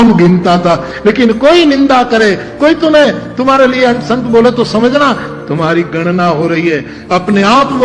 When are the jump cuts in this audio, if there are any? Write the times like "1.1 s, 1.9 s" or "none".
none